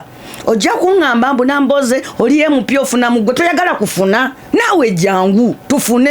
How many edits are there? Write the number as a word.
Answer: one